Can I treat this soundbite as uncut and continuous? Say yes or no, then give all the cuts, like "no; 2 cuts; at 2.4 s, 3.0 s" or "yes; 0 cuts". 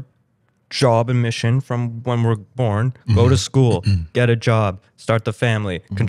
yes; 0 cuts